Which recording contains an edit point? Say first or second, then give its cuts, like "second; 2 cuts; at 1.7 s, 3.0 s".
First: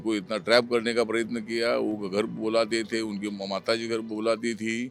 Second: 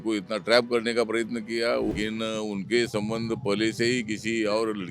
second; 1 cut; at 1.9 s